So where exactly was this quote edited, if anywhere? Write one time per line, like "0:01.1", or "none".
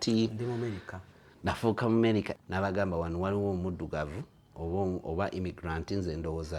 0:02.4